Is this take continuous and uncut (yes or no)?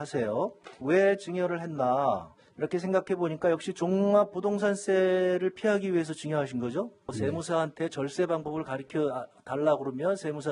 yes